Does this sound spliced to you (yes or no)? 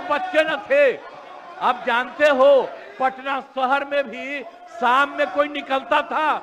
no